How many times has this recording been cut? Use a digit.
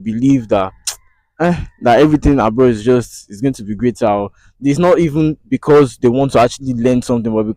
0